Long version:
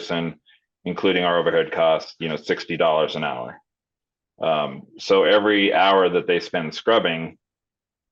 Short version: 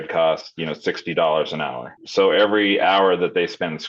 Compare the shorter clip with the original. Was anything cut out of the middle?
yes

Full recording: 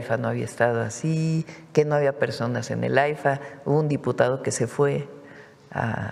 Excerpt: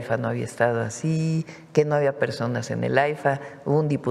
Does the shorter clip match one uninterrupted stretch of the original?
yes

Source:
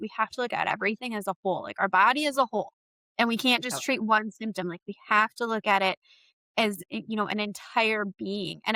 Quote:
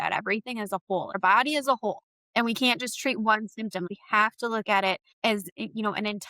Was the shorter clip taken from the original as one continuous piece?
no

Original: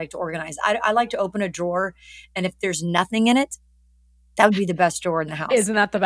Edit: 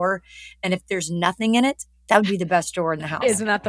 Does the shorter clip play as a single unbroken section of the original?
no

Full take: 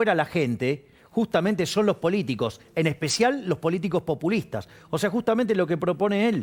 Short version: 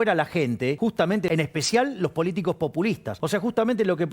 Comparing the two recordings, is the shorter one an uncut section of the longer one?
no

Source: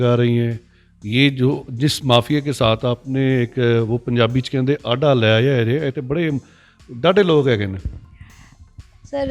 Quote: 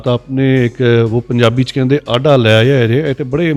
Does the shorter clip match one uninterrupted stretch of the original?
yes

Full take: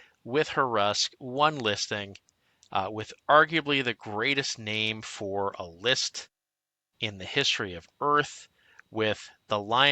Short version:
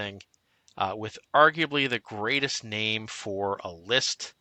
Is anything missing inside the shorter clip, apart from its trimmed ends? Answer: no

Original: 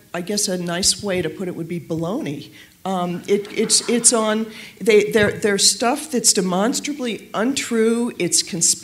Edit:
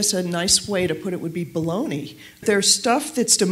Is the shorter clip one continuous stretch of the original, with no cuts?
no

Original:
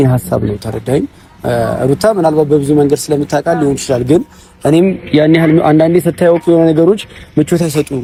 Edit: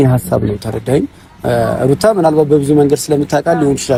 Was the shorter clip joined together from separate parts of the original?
no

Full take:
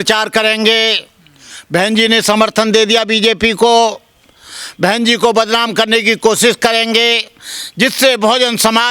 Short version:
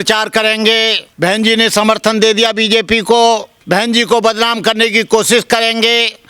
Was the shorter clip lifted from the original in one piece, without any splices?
no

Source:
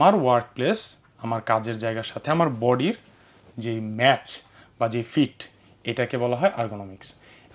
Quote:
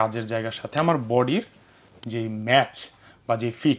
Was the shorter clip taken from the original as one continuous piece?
yes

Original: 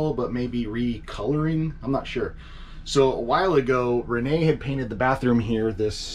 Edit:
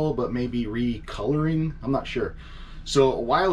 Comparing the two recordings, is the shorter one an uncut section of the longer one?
yes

